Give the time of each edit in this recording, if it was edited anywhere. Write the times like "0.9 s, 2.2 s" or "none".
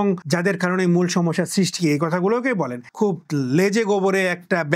2.8 s